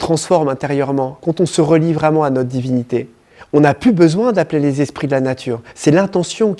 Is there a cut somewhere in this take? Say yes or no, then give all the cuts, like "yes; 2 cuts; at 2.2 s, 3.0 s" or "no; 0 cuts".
no; 0 cuts